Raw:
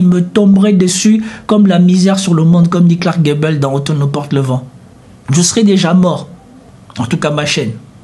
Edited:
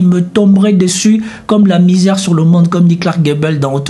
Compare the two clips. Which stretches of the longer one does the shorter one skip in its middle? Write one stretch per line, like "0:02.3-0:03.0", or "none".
none